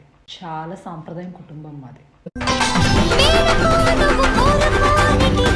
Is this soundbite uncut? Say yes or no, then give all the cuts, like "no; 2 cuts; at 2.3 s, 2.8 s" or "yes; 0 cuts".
yes; 0 cuts